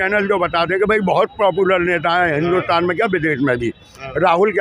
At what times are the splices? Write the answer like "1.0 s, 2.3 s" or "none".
none